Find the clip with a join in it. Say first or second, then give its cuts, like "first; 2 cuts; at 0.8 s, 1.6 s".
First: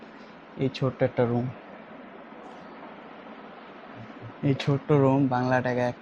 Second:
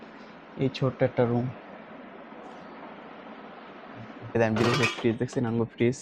second; 1 cut; at 4.3 s